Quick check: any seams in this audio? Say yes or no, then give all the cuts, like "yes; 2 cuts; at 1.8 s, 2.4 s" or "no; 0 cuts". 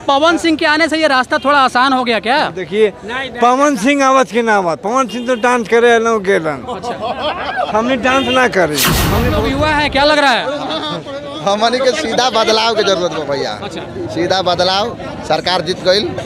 yes; 1 cut; at 9.1 s